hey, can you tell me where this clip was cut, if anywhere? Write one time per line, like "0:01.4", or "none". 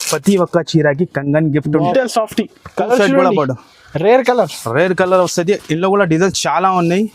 0:01.9